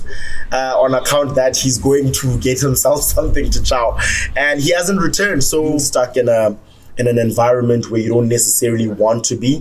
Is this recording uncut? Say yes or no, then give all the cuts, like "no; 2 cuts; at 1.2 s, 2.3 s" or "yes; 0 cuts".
no; 1 cut; at 5.8 s